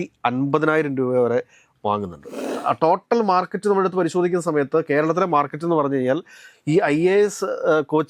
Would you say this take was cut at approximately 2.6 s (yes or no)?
yes